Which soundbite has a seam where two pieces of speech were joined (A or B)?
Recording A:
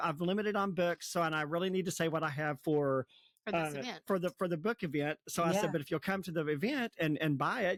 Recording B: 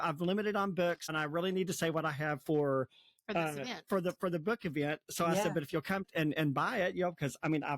B